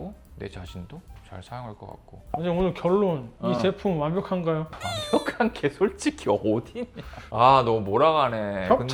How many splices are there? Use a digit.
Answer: 0